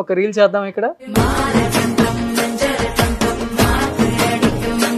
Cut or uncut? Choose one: cut